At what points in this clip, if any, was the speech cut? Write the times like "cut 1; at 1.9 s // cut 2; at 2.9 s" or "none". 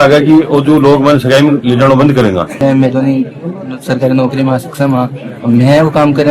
cut 1; at 2.5 s